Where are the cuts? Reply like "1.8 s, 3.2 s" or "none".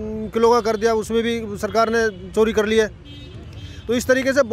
none

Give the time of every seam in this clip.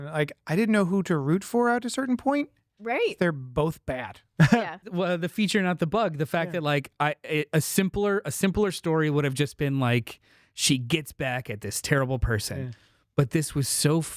4.8 s

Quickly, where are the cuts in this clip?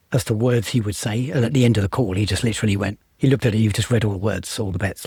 none

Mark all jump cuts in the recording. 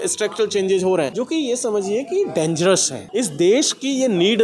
1.1 s, 3.0 s

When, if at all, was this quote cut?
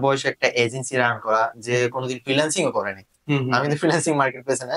none

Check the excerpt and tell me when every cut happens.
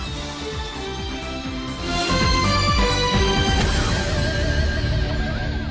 1.9 s

